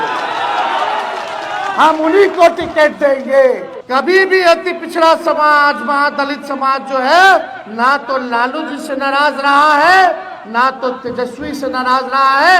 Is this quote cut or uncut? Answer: cut